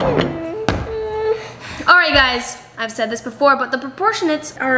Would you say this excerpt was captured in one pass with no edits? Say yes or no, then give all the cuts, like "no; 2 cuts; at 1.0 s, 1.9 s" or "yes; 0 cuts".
yes; 0 cuts